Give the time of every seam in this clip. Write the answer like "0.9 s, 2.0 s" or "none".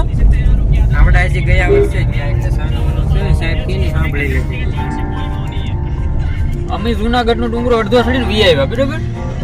none